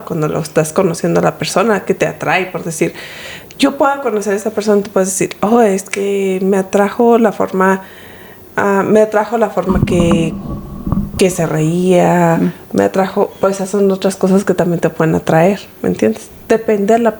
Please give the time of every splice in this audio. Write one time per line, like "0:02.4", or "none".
none